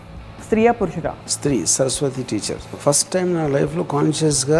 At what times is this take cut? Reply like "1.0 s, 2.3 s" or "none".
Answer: 1.3 s, 2.8 s